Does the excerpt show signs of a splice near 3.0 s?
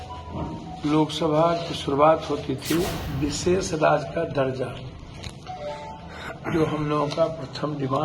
yes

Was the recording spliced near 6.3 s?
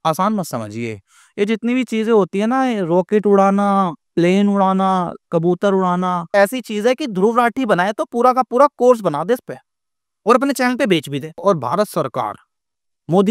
yes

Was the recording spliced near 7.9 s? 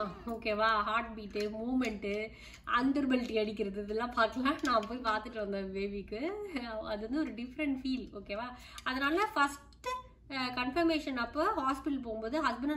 no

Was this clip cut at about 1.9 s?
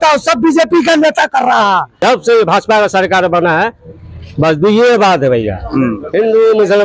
yes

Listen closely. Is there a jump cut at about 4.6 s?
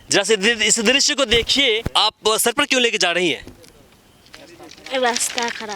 no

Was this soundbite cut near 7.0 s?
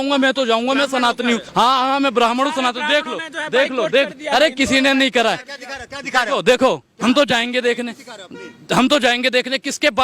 no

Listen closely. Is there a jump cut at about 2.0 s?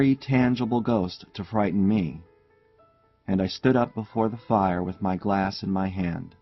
yes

